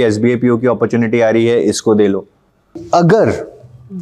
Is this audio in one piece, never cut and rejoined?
no; 1 cut; at 2.8 s

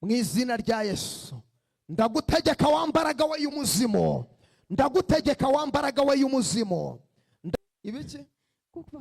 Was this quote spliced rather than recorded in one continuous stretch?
yes; 1 cut; at 7.6 s

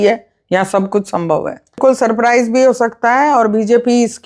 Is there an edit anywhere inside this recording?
yes; 1 cut; at 1.8 s

